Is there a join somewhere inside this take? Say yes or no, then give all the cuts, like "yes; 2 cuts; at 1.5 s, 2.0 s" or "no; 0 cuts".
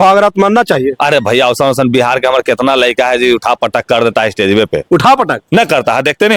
no; 0 cuts